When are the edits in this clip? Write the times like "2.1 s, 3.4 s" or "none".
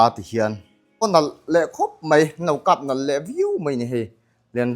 1.0 s